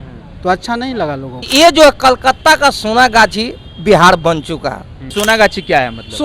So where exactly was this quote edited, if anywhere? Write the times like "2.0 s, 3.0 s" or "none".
1.4 s, 5.1 s